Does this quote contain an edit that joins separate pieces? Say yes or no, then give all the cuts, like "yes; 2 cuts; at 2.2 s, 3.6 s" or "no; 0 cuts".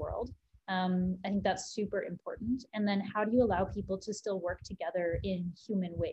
no; 0 cuts